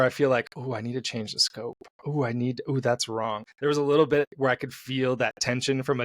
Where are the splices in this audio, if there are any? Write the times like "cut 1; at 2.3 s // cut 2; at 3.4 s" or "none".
cut 1; at 3.4 s // cut 2; at 4.3 s